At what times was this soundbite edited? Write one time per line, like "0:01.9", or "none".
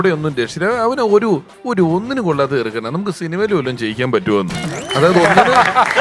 0:01.6